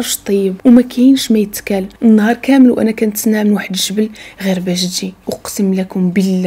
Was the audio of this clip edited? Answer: yes; 2 cuts; at 1.8 s, 5.3 s

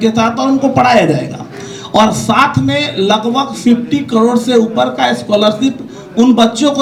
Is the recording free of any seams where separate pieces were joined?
yes; 0 cuts

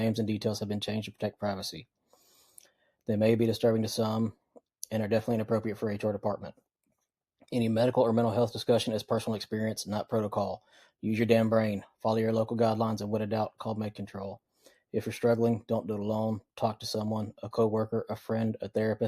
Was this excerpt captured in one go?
yes; 0 cuts

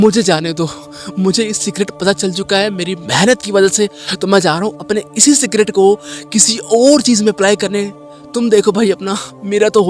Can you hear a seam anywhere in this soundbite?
no; 0 cuts

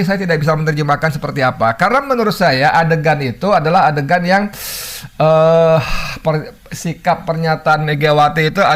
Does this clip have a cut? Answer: no; 0 cuts

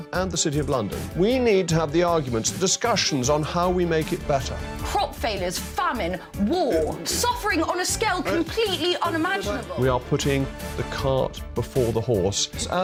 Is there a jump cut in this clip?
no; 0 cuts

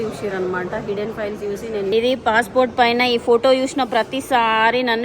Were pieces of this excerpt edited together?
yes; 1 cut; at 1.9 s

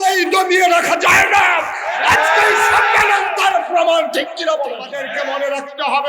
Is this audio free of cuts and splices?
no; 1 cut; at 5.0 s

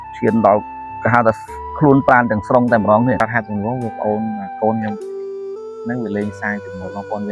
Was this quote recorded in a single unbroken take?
no; 1 cut; at 3.2 s

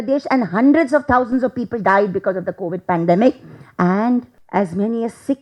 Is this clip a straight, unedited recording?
no; 1 cut; at 4.4 s

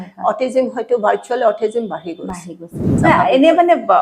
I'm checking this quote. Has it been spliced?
yes; 1 cut; at 2.9 s

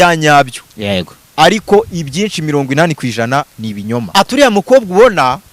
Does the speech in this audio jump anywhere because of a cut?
yes; 1 cut; at 4.0 s

